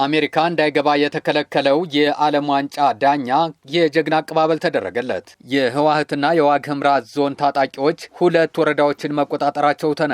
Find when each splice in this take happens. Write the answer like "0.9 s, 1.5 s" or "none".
5.3 s, 8.1 s